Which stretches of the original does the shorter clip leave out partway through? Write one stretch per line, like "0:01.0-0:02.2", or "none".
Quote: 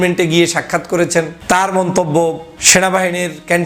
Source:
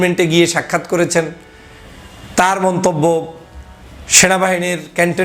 0:01.4-0:02.2
0:03.4-0:04.0